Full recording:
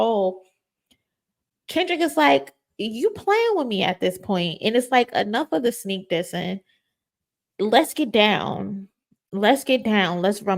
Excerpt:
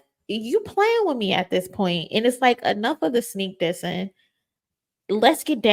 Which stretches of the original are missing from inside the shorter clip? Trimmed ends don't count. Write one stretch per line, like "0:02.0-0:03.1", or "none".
none